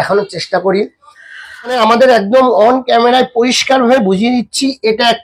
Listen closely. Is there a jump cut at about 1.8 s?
yes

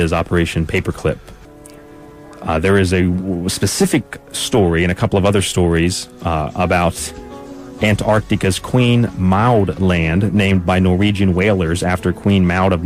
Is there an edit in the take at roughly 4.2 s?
no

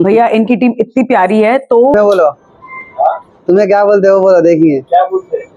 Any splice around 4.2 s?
no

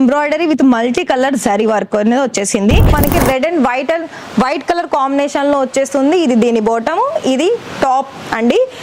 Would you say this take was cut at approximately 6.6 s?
no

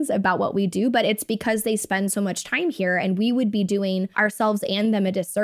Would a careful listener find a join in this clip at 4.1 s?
yes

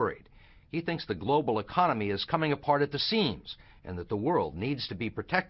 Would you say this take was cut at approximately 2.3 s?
yes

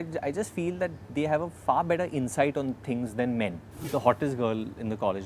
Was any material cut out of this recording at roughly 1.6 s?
no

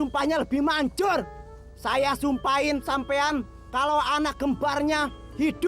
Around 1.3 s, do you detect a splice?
no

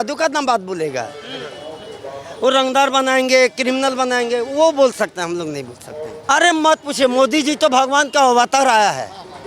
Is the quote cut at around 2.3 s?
no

